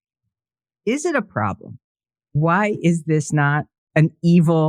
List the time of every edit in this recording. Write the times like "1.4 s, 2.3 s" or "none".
2.3 s, 3.7 s